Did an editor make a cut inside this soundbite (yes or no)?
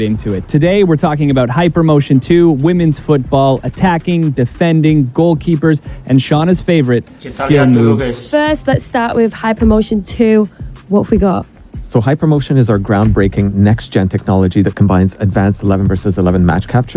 yes